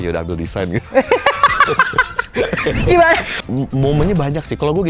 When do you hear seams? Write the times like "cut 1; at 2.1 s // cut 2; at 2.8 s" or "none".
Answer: cut 1; at 3.3 s